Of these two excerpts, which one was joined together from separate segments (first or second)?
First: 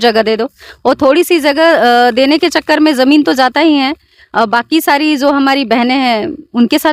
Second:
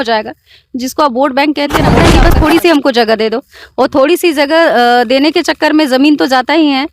second